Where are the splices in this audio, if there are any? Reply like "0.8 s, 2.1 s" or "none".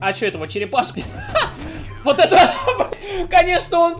0.9 s, 2.9 s